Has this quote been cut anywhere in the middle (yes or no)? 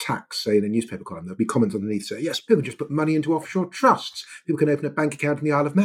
yes